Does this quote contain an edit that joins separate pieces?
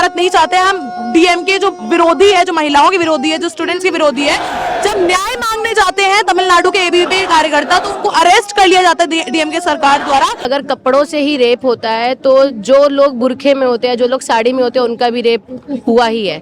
yes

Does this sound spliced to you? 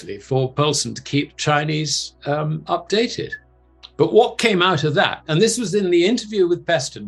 no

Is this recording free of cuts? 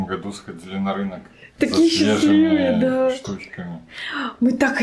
yes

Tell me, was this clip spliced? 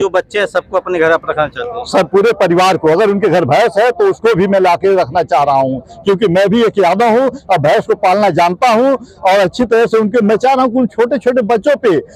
no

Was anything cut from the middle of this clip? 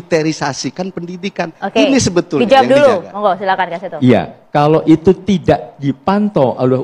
no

